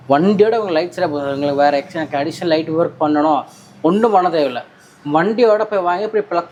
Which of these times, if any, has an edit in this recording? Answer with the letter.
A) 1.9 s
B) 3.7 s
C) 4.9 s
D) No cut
D